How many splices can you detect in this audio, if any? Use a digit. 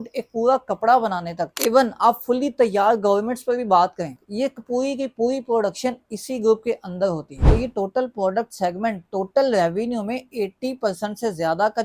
2